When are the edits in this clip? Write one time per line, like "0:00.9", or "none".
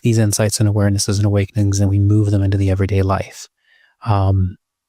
none